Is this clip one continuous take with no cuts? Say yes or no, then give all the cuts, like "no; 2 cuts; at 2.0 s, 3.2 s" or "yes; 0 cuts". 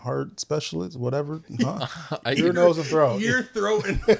yes; 0 cuts